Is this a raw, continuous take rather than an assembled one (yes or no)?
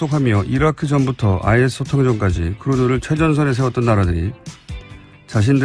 no